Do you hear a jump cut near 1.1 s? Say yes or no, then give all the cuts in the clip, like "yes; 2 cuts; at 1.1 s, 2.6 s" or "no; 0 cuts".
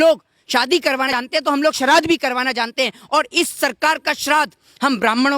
yes; 1 cut; at 1.1 s